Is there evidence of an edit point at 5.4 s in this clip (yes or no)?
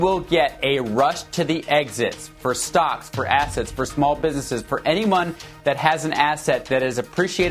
no